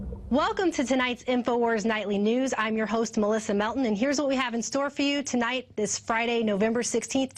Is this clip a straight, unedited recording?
yes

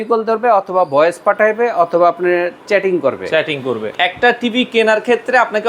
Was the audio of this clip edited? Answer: yes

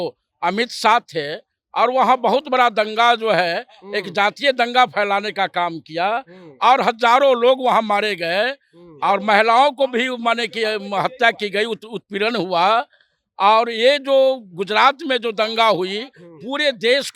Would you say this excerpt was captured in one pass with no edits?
yes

